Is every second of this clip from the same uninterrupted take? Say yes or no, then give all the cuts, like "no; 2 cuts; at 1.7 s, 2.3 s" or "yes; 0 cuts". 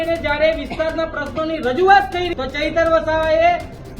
no; 1 cut; at 2.3 s